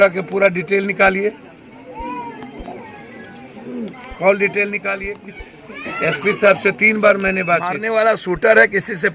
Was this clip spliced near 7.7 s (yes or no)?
yes